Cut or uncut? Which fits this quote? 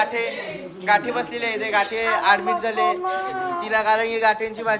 uncut